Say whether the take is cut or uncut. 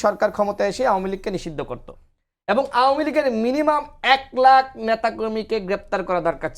uncut